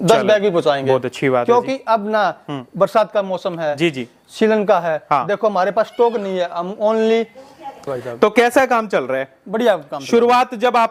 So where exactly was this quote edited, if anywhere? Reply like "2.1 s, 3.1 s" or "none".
7.9 s